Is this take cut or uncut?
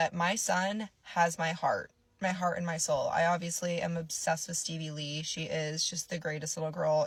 uncut